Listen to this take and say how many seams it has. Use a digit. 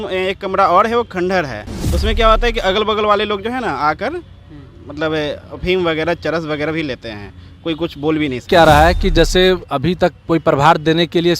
1